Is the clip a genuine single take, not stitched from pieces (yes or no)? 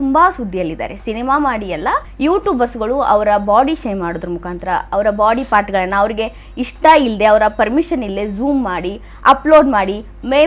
no